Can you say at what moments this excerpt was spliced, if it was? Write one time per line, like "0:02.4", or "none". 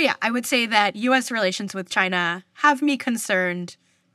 none

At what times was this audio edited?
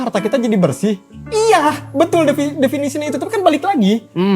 none

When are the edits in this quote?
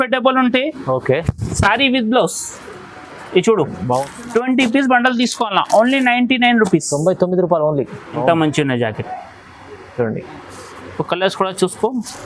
0:04.1
0:08.0

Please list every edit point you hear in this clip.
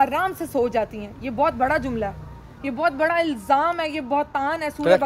none

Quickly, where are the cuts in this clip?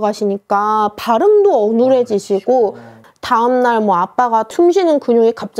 0:03.0
0:04.5

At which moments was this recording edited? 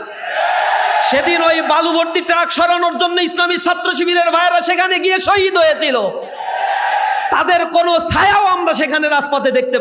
none

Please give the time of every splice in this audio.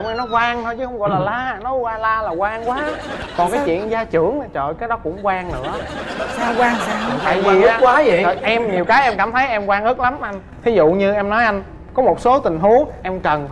none

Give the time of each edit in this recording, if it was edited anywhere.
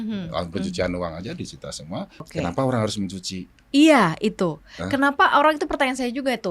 0:02.3

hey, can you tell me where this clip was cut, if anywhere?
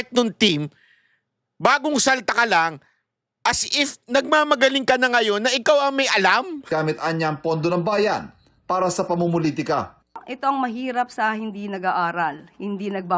0:06.7

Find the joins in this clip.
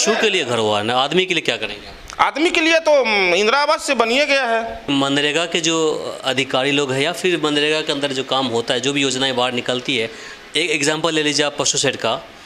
0:04.8

